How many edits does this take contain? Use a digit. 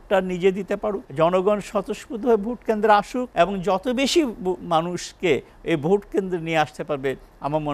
2